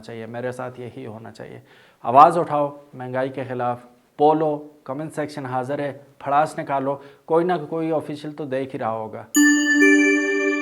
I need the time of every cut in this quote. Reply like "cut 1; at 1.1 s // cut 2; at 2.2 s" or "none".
cut 1; at 9.2 s

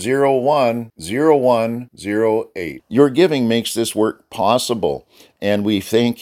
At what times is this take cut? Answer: none

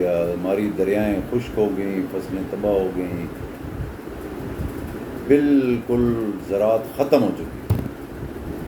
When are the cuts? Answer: none

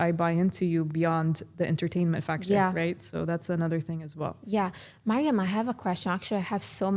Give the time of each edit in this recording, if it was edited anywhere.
none

